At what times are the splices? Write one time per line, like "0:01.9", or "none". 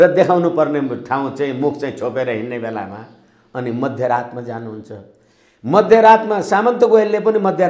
none